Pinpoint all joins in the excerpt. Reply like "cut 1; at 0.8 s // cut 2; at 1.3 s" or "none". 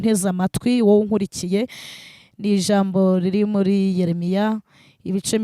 none